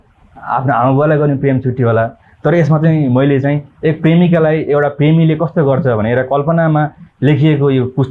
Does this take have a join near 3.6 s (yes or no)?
no